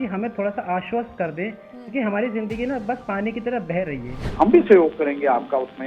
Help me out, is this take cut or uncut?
cut